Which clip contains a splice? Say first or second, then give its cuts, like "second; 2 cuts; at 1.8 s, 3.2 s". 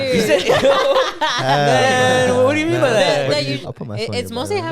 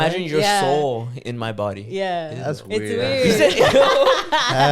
first; 1 cut; at 3.6 s